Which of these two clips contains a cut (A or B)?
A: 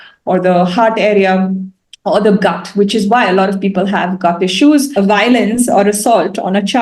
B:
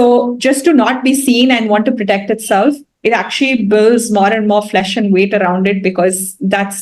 A